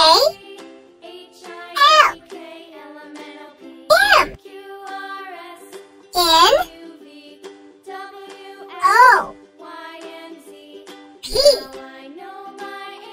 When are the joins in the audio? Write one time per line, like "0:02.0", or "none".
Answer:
0:02.1
0:03.6
0:04.4
0:05.9
0:06.7
0:08.4